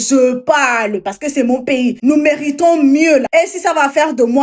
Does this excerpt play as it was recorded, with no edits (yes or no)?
no